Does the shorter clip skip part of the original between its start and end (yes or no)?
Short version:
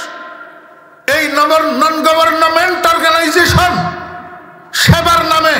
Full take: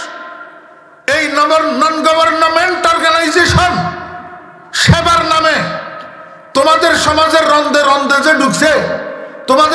no